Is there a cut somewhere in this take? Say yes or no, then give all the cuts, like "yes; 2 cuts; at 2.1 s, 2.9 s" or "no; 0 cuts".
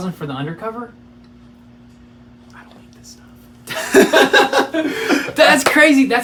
no; 0 cuts